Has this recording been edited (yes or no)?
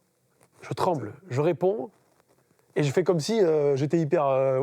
no